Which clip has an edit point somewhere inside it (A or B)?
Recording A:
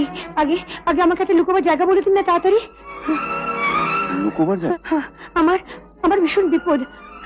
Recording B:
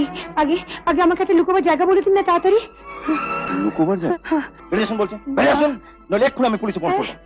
B